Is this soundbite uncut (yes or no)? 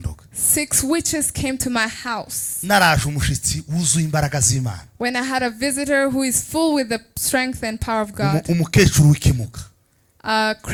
yes